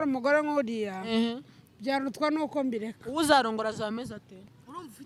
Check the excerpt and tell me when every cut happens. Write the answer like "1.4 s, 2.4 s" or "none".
none